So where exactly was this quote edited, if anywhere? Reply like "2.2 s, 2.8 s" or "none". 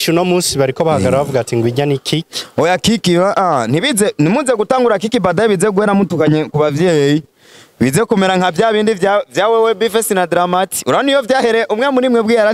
none